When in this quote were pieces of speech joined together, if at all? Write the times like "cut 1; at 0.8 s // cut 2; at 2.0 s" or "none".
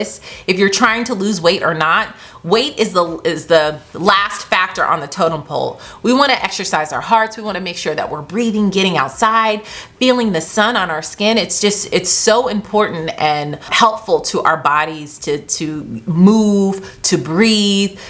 none